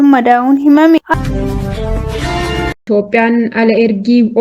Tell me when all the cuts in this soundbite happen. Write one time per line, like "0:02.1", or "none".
0:01.1
0:02.8